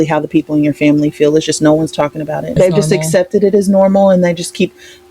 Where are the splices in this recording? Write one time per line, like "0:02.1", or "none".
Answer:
0:02.5